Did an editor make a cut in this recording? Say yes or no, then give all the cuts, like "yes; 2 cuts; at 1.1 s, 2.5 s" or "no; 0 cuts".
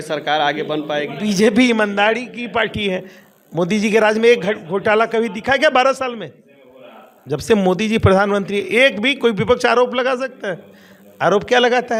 no; 0 cuts